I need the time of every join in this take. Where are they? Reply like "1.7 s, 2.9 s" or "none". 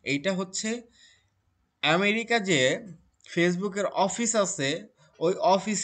none